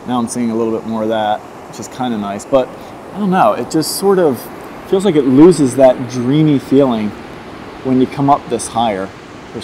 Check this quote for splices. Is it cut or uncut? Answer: uncut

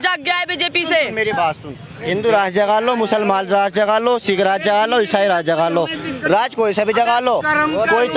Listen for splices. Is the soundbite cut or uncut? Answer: uncut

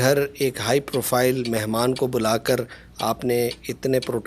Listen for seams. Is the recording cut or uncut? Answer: uncut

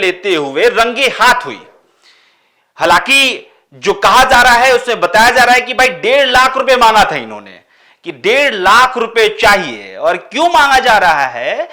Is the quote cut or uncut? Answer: uncut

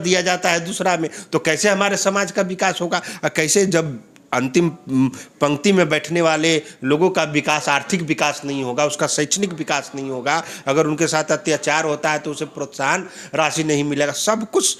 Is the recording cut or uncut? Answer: uncut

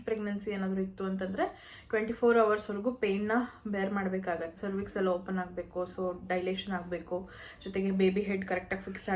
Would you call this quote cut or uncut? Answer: cut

